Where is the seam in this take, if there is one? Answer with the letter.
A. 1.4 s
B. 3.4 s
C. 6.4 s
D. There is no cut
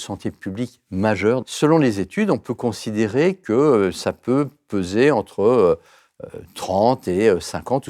A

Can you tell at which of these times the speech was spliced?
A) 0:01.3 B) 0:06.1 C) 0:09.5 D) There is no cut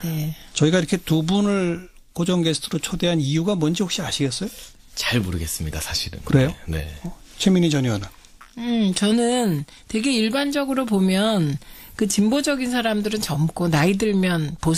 C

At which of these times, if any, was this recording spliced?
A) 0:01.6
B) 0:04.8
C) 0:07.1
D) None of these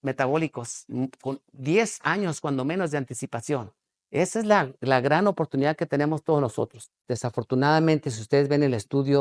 C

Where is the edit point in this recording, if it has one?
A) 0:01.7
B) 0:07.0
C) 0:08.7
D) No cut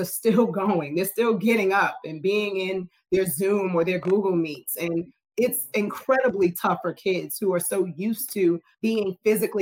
C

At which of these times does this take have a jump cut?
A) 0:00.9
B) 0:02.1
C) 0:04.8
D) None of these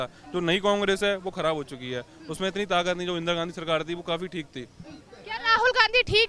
D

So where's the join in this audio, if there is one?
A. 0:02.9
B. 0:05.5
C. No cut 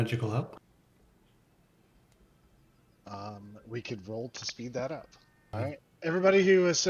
B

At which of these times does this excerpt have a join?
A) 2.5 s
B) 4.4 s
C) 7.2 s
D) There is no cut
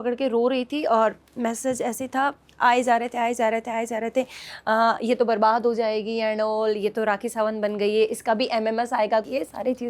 D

